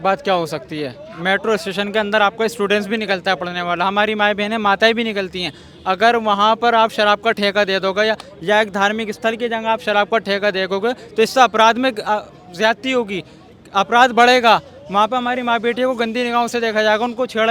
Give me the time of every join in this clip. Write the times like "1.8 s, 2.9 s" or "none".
none